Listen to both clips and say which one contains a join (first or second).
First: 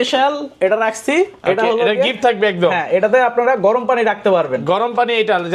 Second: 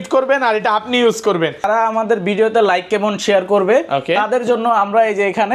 second